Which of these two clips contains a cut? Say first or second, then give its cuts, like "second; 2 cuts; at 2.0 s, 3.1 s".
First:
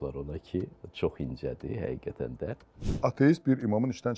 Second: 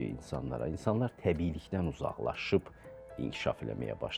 first; 1 cut; at 3.0 s